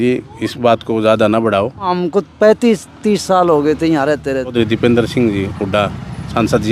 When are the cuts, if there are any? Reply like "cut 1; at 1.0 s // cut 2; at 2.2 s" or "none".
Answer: cut 1; at 1.9 s // cut 2; at 4.5 s